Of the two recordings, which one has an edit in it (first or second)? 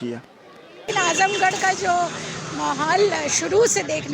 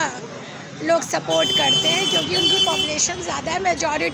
first